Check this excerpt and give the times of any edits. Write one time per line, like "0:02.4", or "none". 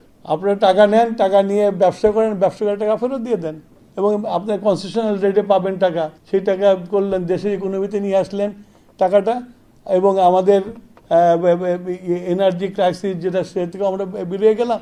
none